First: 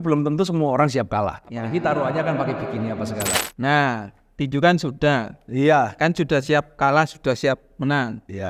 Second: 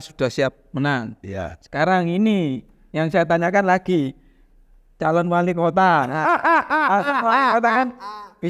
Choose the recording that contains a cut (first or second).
first